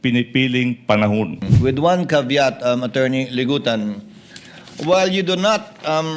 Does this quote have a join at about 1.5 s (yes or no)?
yes